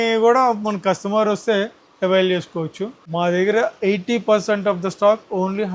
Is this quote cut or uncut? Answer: cut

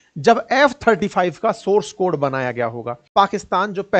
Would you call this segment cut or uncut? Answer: cut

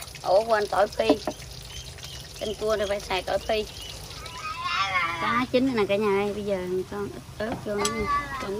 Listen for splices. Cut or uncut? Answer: cut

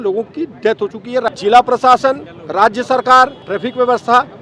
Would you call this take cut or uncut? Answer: cut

